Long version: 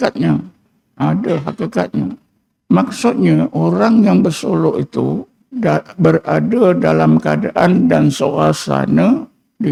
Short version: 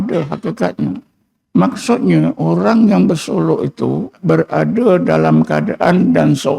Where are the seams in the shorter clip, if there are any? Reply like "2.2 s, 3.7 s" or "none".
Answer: 4.1 s